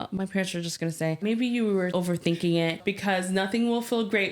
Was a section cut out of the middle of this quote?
yes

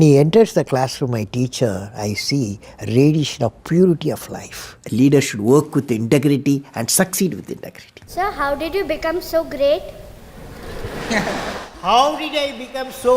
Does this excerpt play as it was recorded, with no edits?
no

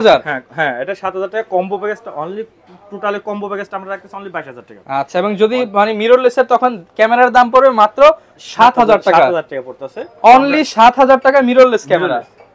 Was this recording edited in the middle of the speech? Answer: no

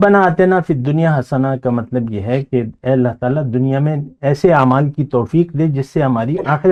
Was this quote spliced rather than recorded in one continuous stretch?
no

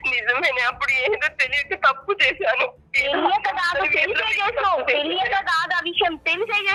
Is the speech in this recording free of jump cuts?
yes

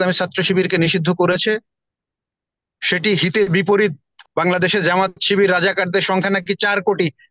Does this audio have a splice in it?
yes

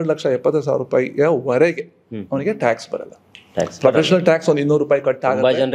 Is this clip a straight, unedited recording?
yes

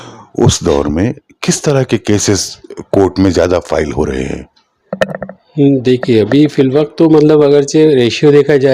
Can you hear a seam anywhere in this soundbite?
no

